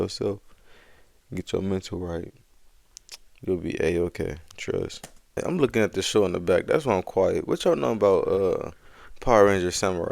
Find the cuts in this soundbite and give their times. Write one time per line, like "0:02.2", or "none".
0:05.4